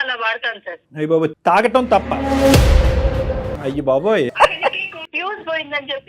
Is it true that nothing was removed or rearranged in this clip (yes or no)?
no